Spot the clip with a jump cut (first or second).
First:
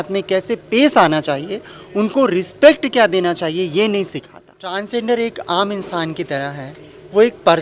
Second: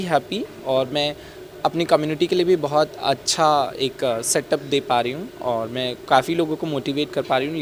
first